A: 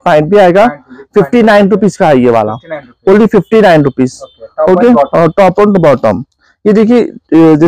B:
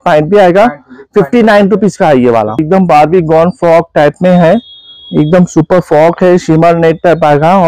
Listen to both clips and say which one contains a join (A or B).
B